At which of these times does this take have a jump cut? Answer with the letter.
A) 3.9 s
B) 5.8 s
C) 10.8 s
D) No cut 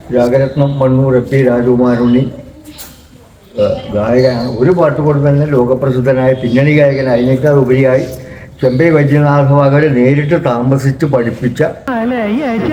D